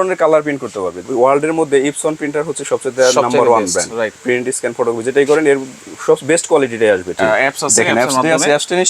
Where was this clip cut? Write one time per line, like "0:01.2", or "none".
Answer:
0:01.1
0:04.2
0:07.2